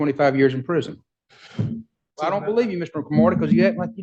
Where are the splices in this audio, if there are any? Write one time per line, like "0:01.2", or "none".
0:02.2